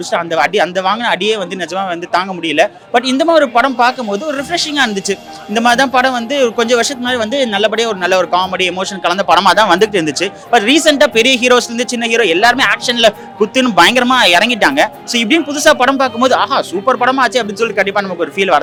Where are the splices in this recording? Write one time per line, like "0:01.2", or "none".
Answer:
none